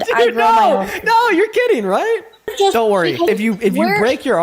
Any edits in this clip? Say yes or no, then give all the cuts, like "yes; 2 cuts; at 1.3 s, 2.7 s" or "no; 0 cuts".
yes; 2 cuts; at 2.5 s, 3.3 s